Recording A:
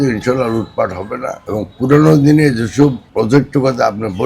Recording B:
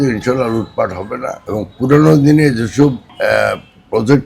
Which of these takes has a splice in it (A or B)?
A